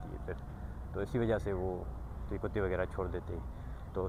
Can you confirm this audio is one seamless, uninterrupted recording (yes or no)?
yes